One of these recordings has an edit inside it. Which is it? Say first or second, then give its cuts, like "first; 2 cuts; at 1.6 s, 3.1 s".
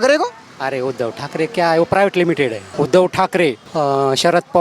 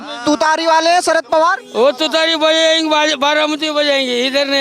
first; 2 cuts; at 2.7 s, 3.6 s